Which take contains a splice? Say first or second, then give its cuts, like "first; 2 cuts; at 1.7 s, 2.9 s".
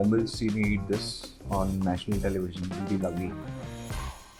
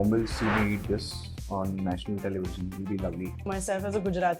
second; 1 cut; at 3.5 s